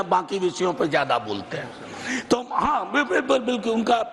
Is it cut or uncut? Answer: uncut